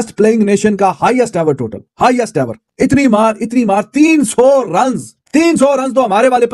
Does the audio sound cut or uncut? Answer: cut